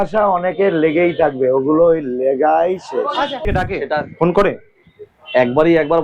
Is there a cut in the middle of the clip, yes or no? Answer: yes